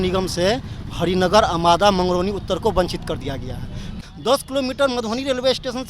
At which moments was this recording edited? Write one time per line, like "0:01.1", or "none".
0:03.9